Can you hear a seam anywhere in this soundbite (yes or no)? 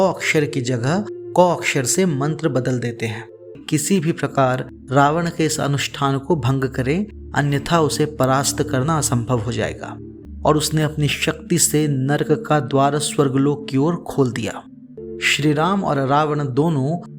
yes